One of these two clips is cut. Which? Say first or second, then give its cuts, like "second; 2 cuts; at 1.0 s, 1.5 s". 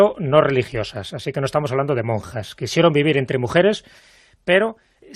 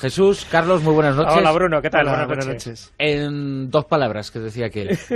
first; 1 cut; at 3.6 s